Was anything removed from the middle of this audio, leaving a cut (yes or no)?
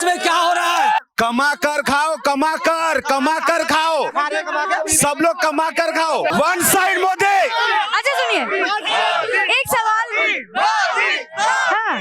yes